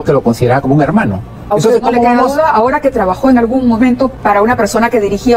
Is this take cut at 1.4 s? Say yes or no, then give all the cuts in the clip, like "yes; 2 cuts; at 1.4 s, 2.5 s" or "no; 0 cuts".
yes; 2 cuts; at 1.4 s, 4.1 s